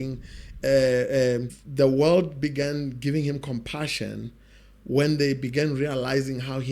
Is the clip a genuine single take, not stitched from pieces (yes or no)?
no